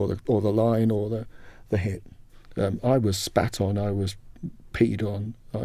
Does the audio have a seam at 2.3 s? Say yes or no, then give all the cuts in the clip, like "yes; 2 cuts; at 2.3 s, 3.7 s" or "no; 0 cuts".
yes; 1 cut; at 2.3 s